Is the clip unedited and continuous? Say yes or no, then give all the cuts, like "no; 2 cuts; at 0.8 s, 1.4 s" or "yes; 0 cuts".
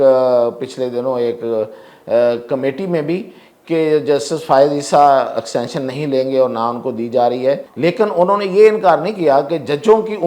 no; 1 cut; at 7.7 s